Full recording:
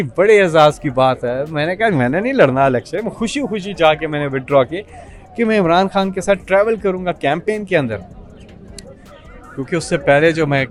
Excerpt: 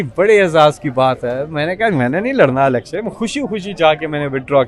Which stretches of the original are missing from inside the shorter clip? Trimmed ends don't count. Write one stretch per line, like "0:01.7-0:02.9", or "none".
none